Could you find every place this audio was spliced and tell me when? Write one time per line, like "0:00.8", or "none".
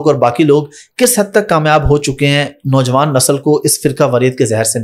none